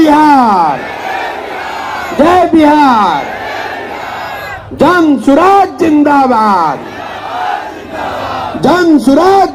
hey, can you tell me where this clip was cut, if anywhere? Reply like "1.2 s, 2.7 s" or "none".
none